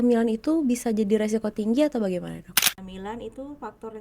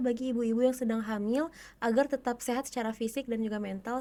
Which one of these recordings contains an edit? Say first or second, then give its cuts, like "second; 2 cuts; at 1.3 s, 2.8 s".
first; 1 cut; at 2.6 s